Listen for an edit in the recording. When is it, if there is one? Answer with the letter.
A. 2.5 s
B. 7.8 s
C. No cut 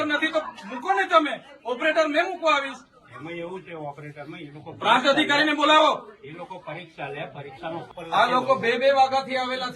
B